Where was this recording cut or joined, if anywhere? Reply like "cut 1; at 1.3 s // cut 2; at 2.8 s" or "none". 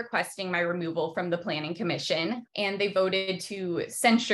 cut 1; at 2.5 s